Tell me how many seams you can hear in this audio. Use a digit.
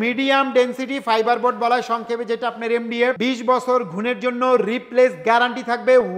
1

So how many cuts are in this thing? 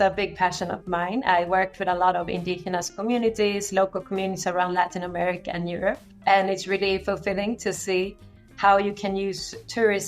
1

